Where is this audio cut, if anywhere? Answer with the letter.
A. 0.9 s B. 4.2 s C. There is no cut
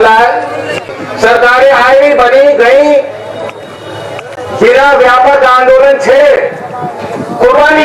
A